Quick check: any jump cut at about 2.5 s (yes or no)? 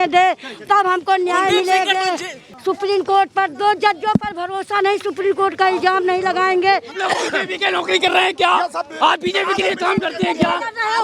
yes